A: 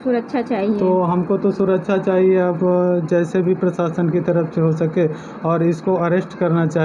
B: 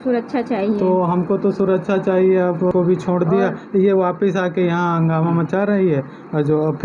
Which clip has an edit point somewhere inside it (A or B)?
B